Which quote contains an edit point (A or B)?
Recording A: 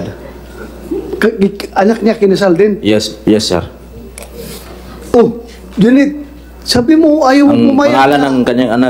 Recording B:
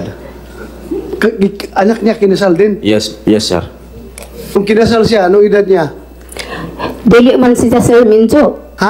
B